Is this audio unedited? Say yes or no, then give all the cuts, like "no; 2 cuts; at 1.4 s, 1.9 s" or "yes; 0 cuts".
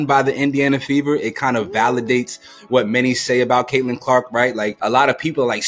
no; 1 cut; at 4.7 s